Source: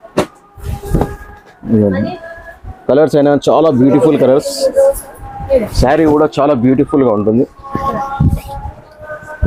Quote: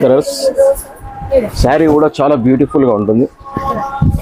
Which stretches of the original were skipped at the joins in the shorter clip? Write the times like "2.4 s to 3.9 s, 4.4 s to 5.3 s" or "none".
none

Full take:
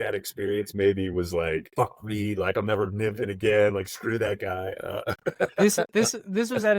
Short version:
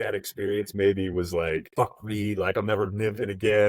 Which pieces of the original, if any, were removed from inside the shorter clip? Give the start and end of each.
none

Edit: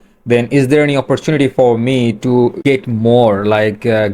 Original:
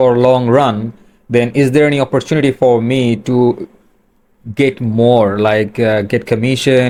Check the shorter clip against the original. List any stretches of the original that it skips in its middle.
3.6 s to 4.5 s

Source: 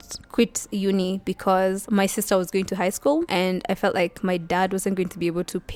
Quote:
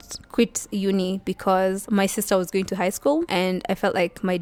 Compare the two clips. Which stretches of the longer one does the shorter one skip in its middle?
none

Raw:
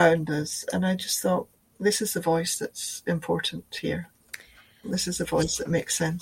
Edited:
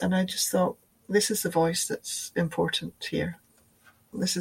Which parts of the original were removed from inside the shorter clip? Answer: none

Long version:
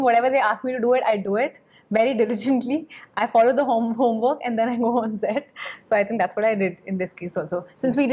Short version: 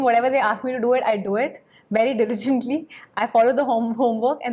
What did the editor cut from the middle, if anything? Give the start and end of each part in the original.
none

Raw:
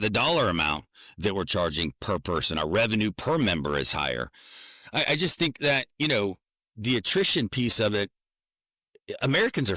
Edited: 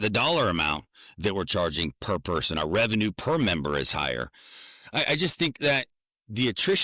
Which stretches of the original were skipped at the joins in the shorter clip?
5.9 s to 6.4 s

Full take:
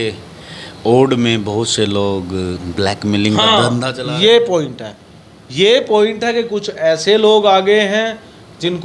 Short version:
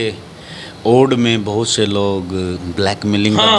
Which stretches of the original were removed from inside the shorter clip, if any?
none

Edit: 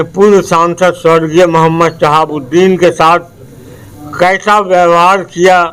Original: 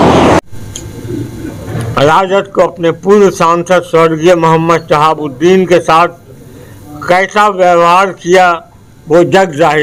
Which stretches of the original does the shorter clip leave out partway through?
none

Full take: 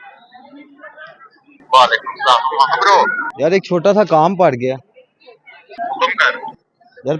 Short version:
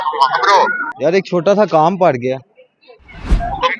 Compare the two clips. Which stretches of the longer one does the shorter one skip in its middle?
none

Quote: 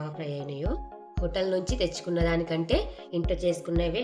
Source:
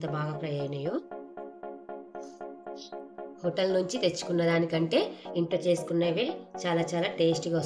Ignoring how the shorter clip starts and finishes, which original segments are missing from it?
1.2 s to 3.2 s

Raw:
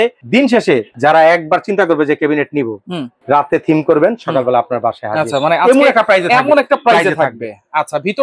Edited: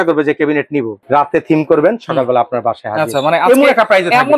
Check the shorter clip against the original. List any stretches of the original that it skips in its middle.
2.8 s to 3.1 s

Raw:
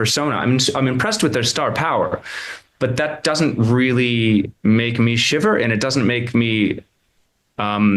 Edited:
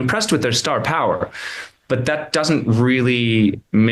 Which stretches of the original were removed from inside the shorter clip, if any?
none

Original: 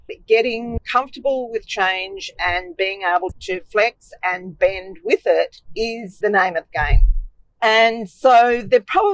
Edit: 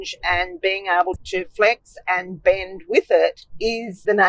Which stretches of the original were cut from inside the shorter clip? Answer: none

